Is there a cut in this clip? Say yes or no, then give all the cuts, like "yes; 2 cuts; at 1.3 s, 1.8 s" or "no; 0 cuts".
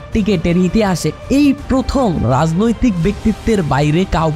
no; 0 cuts